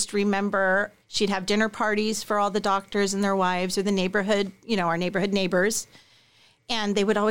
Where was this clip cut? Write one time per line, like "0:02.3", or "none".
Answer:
0:01.0